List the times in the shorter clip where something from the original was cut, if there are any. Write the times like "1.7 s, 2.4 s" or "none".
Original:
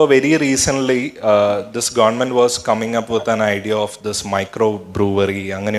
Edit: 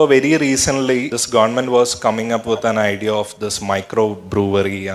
1.1 s